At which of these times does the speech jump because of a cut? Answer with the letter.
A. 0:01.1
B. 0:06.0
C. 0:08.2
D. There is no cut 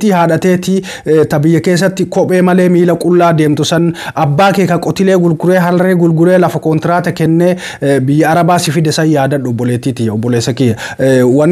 D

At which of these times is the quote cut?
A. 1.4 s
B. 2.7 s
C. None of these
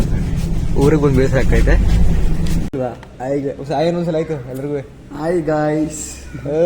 B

